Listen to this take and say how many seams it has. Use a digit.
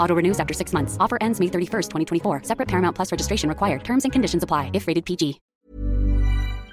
1